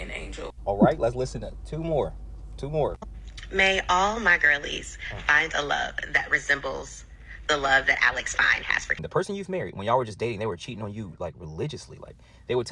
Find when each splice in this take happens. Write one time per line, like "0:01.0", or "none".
0:09.0